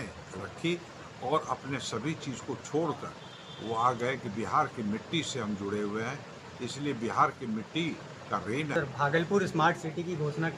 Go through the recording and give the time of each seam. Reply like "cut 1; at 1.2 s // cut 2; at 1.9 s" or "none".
cut 1; at 8.7 s